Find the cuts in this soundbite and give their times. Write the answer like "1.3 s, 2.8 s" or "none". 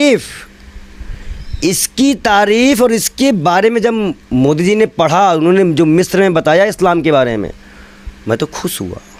none